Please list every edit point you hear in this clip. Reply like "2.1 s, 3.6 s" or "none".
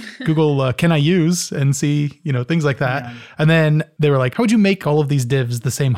3.9 s, 4.8 s